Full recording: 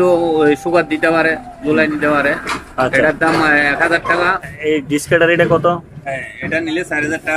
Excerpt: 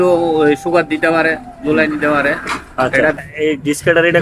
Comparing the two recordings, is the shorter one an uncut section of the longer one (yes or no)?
no